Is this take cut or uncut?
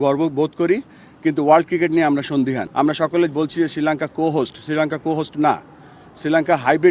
cut